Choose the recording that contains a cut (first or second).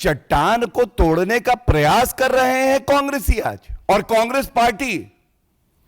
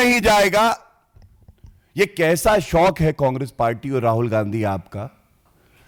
first